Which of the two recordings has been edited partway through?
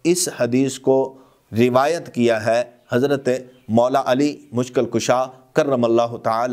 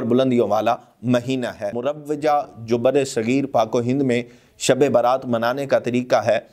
second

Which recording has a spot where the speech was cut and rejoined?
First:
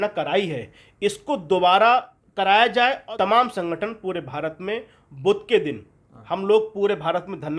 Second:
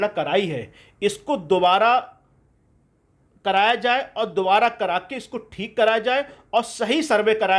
first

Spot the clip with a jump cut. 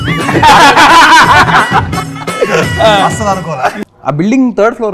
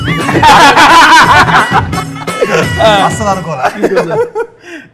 first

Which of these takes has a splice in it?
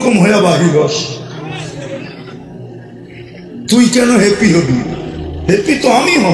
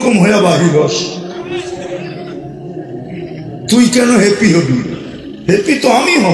second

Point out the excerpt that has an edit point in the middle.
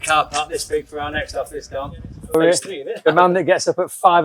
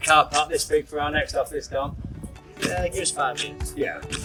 first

